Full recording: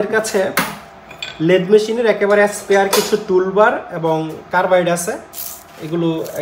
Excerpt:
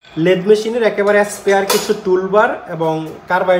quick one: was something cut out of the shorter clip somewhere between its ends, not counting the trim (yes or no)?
no